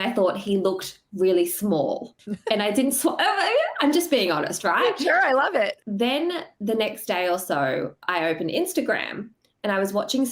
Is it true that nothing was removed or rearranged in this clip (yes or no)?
no